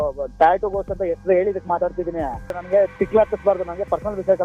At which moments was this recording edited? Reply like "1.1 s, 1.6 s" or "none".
2.6 s